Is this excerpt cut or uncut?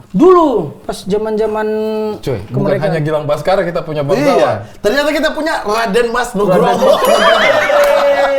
uncut